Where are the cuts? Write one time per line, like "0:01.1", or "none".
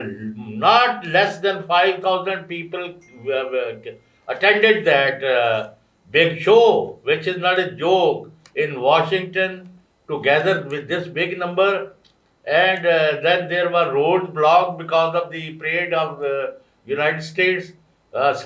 none